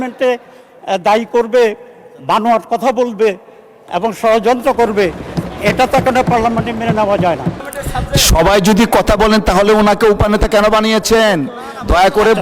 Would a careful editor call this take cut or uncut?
cut